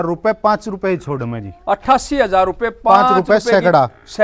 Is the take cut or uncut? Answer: uncut